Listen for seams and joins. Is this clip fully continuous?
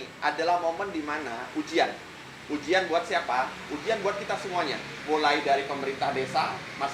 yes; 0 cuts

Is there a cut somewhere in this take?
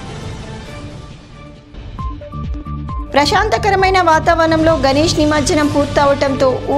yes; 1 cut; at 1.6 s

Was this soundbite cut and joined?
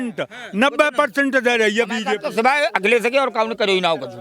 yes; 1 cut; at 2.2 s

